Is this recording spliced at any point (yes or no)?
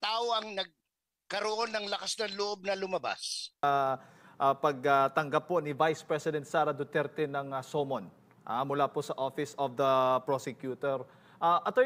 yes